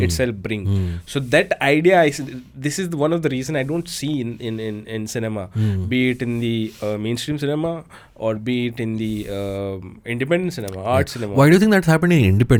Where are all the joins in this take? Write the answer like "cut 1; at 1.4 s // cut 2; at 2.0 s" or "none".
none